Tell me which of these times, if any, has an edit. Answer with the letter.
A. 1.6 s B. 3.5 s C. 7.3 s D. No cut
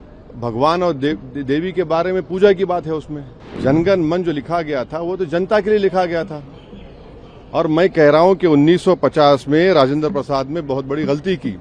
B